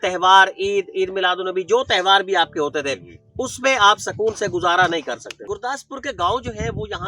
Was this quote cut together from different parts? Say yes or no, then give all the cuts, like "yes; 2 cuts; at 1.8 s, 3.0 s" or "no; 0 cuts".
yes; 1 cut; at 5.3 s